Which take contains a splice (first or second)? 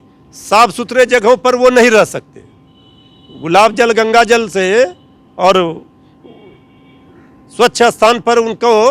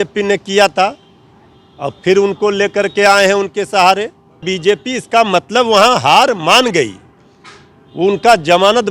second